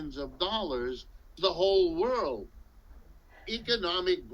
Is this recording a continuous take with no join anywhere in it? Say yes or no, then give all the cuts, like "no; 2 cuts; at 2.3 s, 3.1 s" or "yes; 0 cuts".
no; 1 cut; at 1.3 s